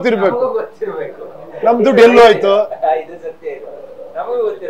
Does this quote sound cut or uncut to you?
uncut